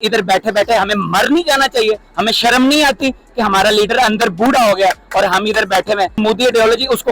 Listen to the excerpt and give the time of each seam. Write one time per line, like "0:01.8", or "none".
0:06.2